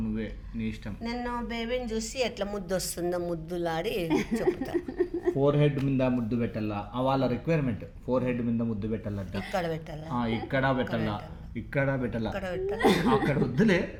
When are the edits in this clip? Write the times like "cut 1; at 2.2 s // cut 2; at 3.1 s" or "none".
none